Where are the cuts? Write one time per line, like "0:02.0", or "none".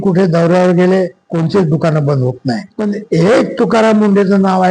0:01.2
0:02.7